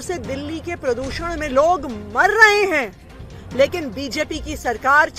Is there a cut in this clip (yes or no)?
no